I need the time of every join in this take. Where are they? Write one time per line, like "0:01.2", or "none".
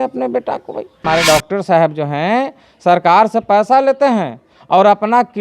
0:01.0

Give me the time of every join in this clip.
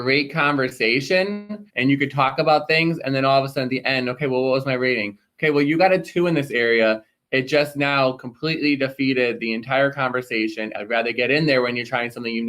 0:01.6
0:10.7

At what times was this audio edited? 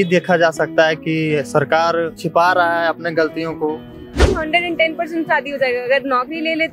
0:02.2
0:04.2

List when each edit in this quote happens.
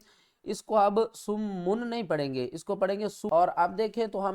0:03.2

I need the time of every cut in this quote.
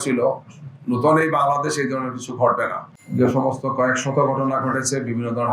0:03.3

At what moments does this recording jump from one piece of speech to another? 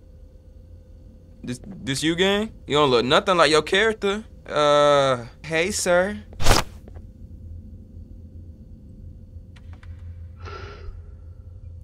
0:02.6
0:04.3
0:05.3

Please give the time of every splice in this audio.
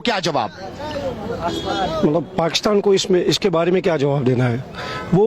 none

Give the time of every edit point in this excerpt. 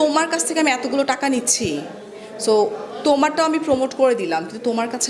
none

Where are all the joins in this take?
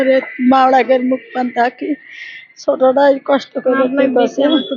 none

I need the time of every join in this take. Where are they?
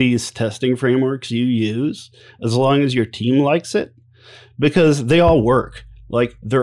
none

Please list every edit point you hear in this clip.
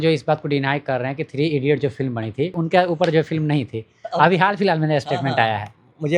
0:02.6

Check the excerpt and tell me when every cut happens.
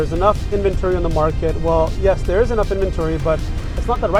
none

